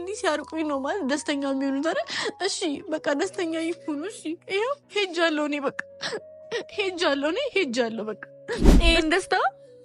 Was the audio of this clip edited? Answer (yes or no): yes